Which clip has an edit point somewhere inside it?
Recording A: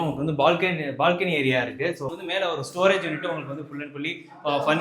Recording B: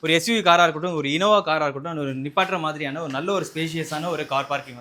A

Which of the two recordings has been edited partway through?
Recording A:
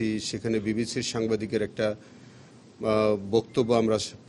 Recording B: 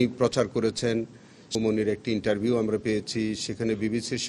B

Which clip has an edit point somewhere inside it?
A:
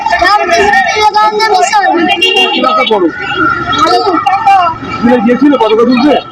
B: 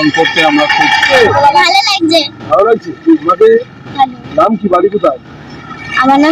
B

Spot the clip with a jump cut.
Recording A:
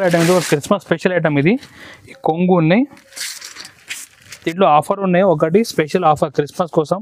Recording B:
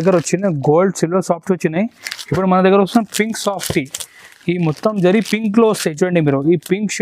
A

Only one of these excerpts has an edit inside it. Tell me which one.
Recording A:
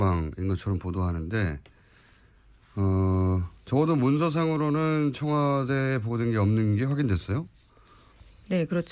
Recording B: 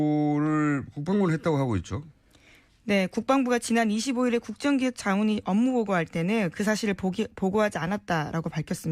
A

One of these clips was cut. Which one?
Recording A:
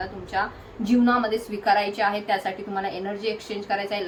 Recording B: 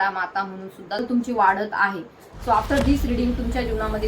B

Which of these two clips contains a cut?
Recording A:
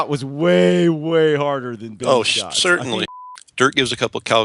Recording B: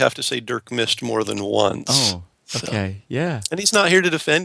A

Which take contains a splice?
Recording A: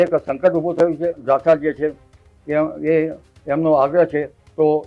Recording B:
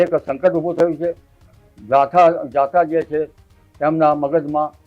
A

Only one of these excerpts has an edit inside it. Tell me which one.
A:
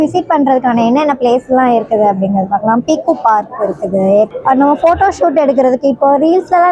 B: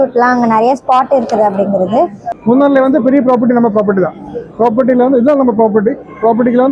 B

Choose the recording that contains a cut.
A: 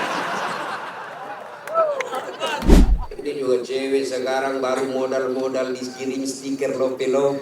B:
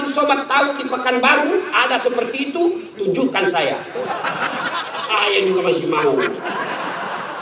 A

